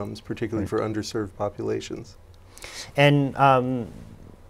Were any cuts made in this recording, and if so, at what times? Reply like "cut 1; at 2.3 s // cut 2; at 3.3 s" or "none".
none